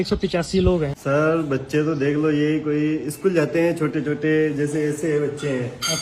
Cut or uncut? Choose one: cut